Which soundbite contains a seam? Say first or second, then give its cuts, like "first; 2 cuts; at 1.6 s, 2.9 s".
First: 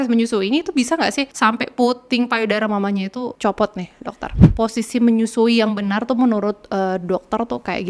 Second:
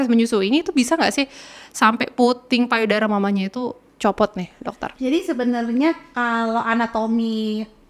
first; 3 cuts; at 1.3 s, 3.3 s, 4.4 s